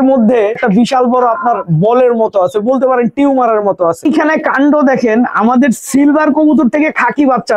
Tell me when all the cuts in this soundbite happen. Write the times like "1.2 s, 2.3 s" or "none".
4.0 s